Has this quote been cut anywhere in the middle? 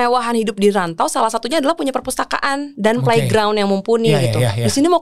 no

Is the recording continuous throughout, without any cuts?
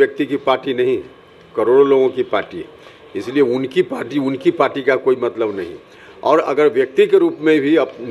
yes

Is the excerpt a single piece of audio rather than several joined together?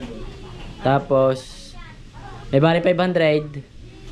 yes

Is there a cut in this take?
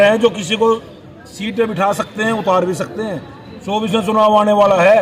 no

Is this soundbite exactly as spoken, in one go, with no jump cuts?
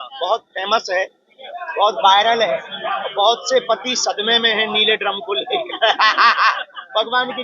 yes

